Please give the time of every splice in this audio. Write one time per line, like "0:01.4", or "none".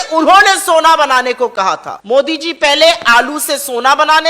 0:01.9